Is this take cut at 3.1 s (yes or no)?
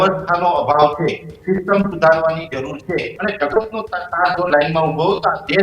yes